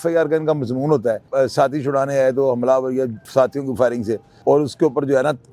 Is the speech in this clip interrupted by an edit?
yes; 2 cuts; at 1.2 s, 4.3 s

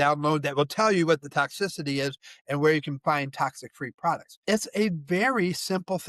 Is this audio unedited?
no; 1 cut; at 4.3 s

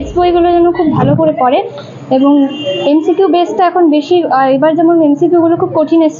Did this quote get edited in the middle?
no; 0 cuts

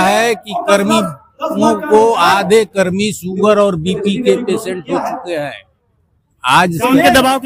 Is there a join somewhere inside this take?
no; 0 cuts

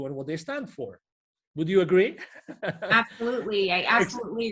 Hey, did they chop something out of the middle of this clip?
no; 0 cuts

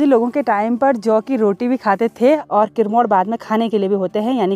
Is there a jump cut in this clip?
yes; 1 cut; at 2.4 s

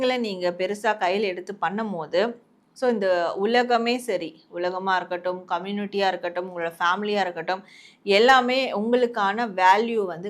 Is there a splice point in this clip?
no; 0 cuts

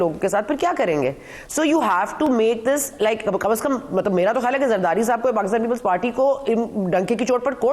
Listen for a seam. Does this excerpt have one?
no; 0 cuts

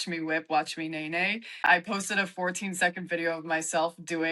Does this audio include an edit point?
yes; 1 cut; at 1.7 s

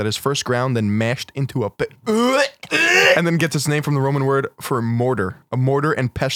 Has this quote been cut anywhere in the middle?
no; 0 cuts

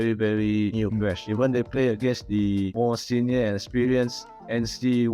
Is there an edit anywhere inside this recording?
yes; 2 cuts; at 1.0 s, 2.7 s

